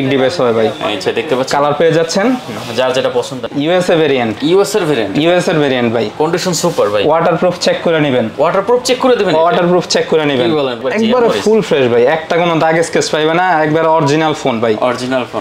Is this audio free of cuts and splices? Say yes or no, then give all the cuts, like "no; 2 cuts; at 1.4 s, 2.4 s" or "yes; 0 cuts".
no; 2 cuts; at 3.4 s, 10.8 s